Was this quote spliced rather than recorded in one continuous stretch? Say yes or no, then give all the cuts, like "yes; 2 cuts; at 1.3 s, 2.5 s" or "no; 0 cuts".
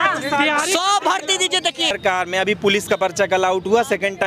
yes; 1 cut; at 1.9 s